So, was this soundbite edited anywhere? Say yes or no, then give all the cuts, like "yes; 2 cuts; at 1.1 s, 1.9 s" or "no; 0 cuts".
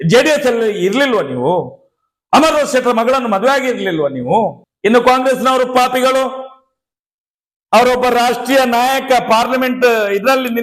yes; 1 cut; at 4.6 s